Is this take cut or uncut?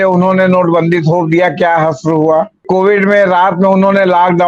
cut